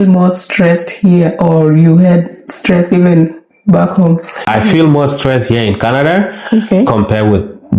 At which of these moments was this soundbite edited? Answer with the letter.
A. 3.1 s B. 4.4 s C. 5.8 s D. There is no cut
B